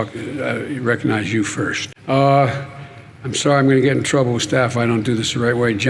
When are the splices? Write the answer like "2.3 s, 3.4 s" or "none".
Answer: 1.9 s